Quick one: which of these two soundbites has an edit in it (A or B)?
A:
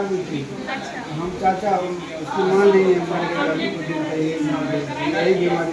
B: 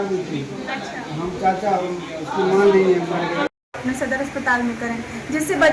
B